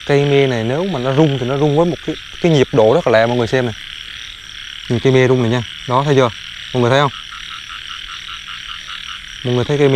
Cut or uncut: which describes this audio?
uncut